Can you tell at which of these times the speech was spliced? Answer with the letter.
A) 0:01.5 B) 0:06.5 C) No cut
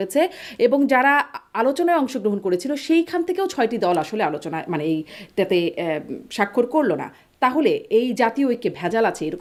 C